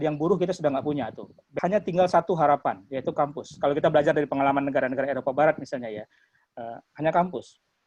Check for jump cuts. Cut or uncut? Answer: cut